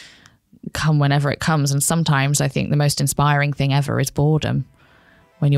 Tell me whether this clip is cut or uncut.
uncut